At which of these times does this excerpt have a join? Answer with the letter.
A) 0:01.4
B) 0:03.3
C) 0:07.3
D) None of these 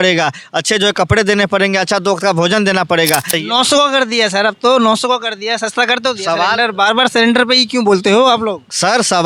B